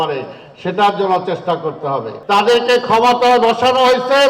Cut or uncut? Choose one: cut